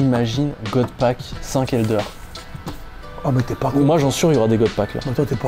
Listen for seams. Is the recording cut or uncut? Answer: uncut